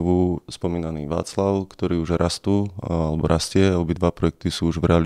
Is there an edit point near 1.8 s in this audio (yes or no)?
no